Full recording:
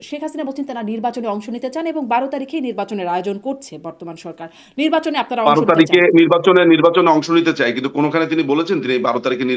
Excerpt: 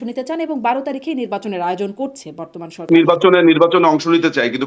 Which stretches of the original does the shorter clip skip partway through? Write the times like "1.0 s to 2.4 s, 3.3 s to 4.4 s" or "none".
4.4 s to 6.1 s